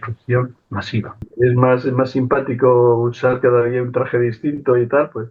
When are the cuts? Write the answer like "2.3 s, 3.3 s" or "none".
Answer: 1.2 s